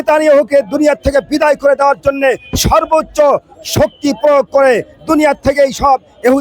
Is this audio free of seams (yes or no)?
yes